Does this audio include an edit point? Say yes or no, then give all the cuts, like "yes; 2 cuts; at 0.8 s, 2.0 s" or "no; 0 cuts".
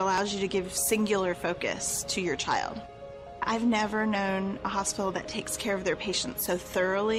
no; 0 cuts